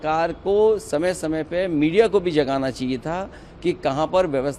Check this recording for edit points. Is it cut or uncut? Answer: uncut